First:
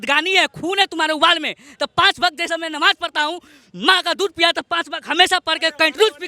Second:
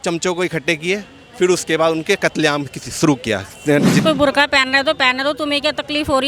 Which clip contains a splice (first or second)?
second